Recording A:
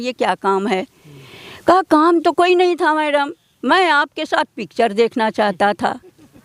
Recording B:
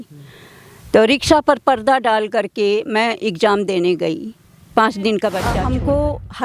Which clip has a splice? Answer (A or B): B